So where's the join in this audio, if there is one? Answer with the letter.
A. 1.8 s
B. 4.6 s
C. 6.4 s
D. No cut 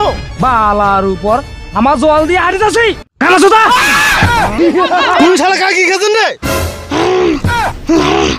B